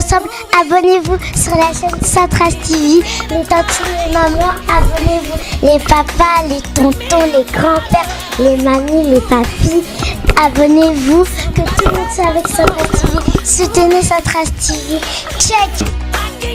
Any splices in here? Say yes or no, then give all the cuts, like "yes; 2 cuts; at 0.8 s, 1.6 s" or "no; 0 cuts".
no; 0 cuts